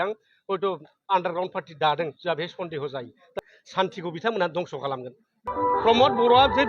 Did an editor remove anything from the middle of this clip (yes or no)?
yes